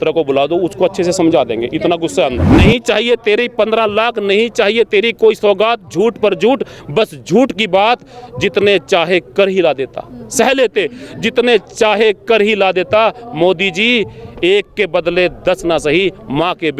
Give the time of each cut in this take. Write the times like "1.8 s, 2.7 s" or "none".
2.4 s